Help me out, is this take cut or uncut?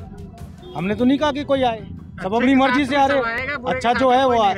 uncut